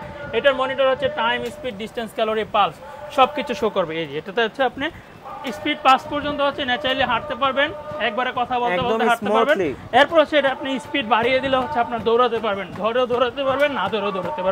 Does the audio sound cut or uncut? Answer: uncut